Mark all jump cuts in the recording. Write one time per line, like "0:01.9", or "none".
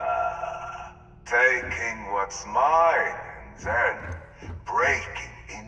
none